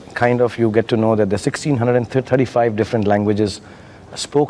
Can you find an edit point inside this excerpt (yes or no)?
no